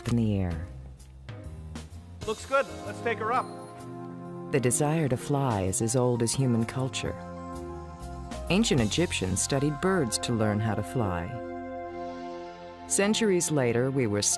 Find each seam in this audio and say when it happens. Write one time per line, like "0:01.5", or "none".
0:08.2